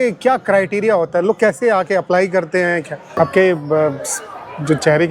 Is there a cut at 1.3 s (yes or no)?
no